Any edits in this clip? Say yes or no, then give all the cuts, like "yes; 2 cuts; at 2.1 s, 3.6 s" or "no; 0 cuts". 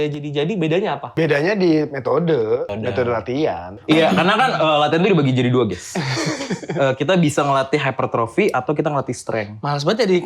yes; 3 cuts; at 1.0 s, 2.7 s, 3.8 s